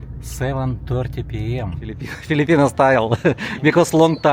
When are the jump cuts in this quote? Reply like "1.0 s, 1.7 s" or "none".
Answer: 2.1 s